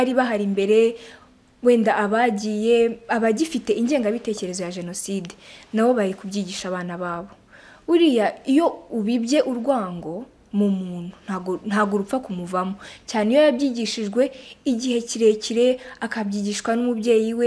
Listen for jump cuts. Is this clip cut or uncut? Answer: uncut